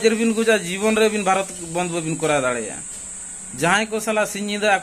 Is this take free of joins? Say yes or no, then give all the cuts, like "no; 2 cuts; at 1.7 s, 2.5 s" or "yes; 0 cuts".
yes; 0 cuts